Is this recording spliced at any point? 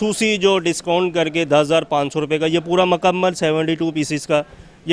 no; 0 cuts

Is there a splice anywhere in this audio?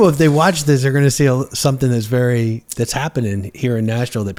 no; 0 cuts

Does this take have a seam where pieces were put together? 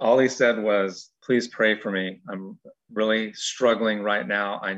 yes; 1 cut; at 1.1 s

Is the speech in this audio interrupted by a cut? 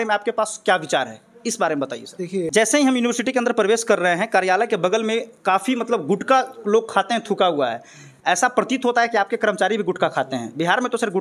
yes; 1 cut; at 2.5 s

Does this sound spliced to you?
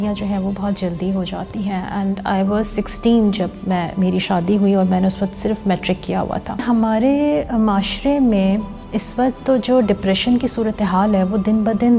yes; 1 cut; at 6.6 s

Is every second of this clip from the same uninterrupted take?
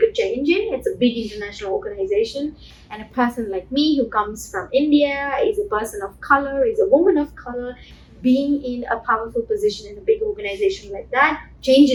yes; 0 cuts

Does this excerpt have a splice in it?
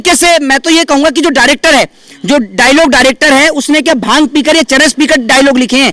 no; 0 cuts

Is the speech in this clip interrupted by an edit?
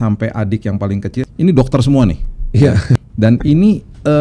yes; 2 cuts; at 1.2 s, 3.0 s

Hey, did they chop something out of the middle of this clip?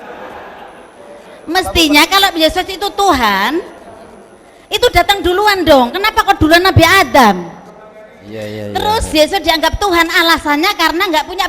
yes; 1 cut; at 0.9 s

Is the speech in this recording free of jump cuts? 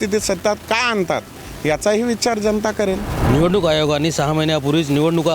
no; 1 cut; at 3.1 s

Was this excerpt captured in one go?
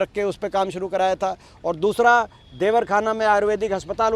yes; 0 cuts

